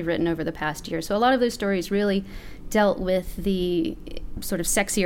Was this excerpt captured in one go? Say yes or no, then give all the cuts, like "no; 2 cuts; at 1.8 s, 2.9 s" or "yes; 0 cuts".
yes; 0 cuts